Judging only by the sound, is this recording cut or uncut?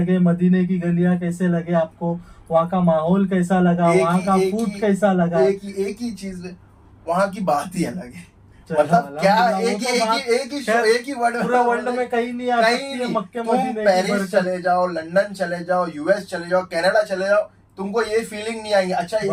uncut